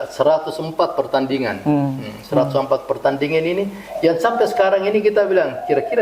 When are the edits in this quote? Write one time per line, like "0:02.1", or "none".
none